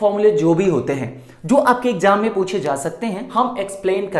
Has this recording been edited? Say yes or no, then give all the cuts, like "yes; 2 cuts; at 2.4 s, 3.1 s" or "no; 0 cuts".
yes; 1 cut; at 3.3 s